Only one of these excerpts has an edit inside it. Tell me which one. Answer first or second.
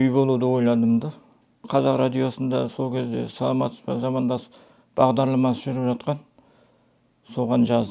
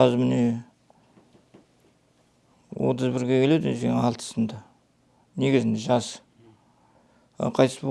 first